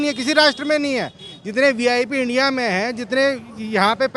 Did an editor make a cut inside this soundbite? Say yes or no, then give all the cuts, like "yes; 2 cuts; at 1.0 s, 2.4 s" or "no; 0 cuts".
no; 0 cuts